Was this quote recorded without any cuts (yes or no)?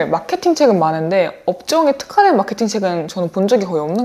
yes